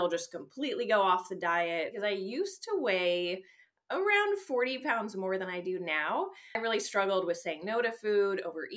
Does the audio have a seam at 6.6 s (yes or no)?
yes